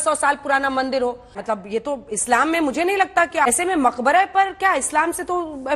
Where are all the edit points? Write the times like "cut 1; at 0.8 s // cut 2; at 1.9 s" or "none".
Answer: cut 1; at 1.4 s // cut 2; at 3.5 s